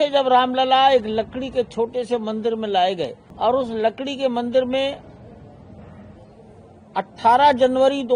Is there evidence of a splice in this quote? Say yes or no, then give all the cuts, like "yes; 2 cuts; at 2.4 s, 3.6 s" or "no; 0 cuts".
yes; 1 cut; at 3.2 s